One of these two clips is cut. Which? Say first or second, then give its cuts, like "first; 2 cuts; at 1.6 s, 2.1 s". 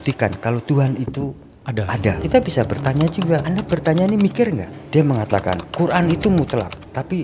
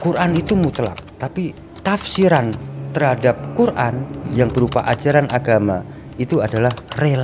first; 3 cuts; at 2.2 s, 3.4 s, 4.7 s